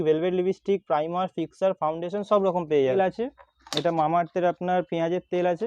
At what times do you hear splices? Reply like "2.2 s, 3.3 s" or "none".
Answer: 2.9 s